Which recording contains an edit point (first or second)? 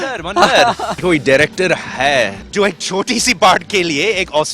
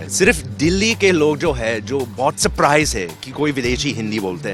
first